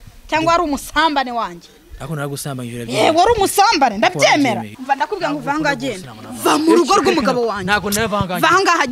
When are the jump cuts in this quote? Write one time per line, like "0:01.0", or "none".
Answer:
0:04.7